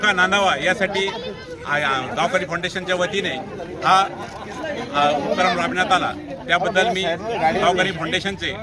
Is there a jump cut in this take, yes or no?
no